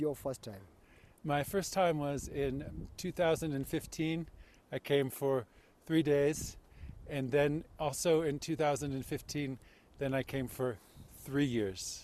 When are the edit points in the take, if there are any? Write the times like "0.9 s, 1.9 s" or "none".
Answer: none

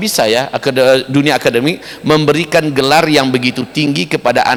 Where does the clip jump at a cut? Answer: none

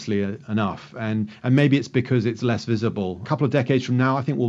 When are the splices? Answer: 3.2 s

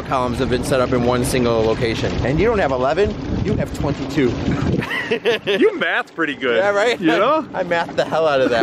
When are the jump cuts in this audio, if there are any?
2.2 s

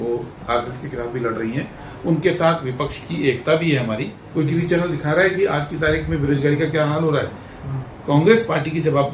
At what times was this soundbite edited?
4.2 s

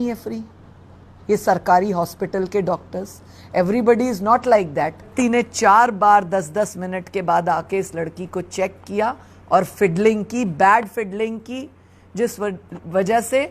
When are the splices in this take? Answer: 5.1 s

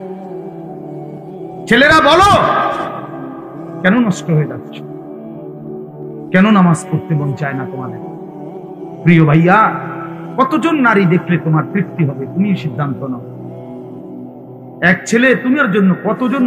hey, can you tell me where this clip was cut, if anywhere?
4.5 s, 6.3 s

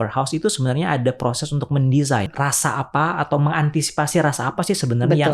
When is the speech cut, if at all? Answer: 2.3 s

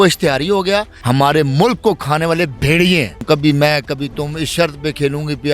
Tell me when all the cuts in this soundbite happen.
1.0 s, 3.2 s

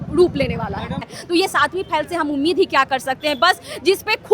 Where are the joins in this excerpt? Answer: 1.1 s

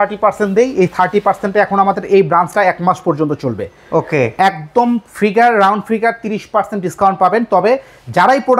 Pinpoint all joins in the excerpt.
none

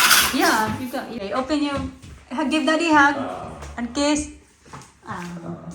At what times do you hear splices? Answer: 1.2 s

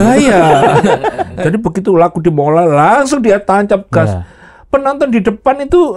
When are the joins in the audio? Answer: 1.3 s

